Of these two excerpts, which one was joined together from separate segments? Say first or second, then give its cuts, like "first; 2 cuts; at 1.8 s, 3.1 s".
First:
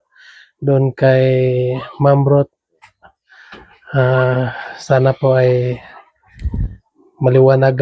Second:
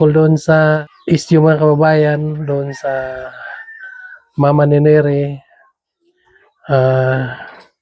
second; 1 cut; at 0.9 s